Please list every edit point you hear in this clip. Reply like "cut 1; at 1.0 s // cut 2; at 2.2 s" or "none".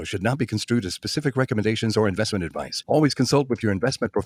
none